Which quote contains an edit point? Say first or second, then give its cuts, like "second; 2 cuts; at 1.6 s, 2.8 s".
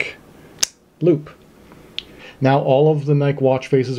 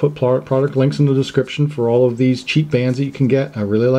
first; 1 cut; at 2.1 s